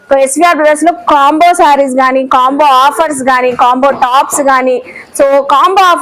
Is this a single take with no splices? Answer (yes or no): yes